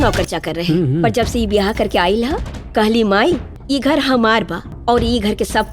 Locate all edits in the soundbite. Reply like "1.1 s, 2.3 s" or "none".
3.5 s, 4.6 s